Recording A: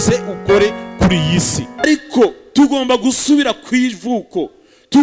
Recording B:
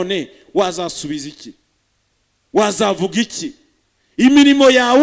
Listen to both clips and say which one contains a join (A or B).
A